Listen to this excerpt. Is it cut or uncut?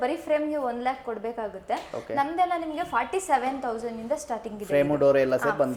uncut